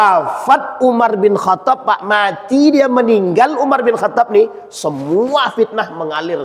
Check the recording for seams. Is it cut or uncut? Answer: uncut